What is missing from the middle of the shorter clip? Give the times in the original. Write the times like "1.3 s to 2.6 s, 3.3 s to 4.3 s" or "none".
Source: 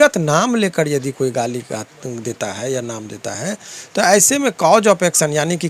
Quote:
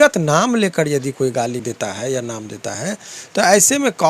1.6 s to 2.2 s